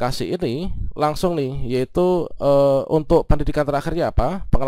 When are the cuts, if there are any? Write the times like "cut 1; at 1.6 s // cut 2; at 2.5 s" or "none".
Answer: none